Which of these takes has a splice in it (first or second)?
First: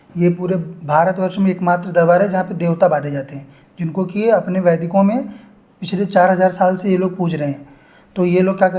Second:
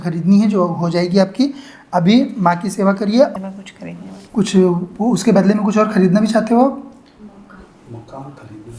second